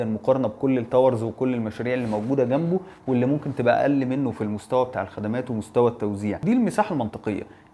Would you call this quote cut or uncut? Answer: cut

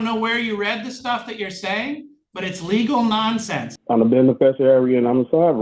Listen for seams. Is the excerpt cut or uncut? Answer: cut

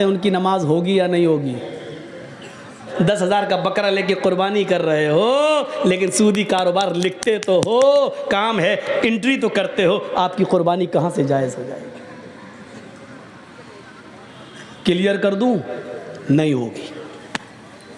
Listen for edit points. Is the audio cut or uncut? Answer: cut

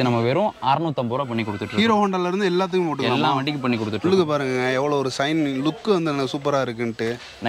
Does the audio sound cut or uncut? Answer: uncut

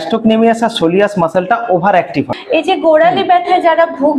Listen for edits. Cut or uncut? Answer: cut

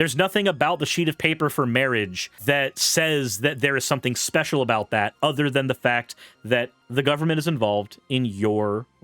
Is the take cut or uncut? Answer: cut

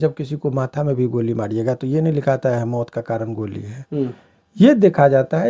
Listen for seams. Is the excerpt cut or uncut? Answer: uncut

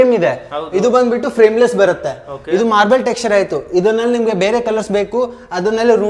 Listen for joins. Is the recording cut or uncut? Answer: uncut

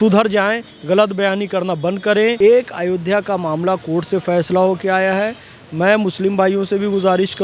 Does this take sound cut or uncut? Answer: cut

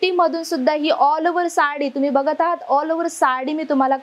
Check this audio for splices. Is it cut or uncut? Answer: uncut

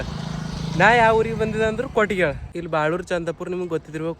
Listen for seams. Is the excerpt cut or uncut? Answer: cut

